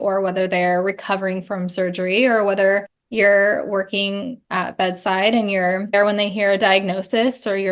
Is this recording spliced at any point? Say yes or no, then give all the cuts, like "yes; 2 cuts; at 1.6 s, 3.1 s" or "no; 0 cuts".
yes; 2 cuts; at 3.0 s, 5.9 s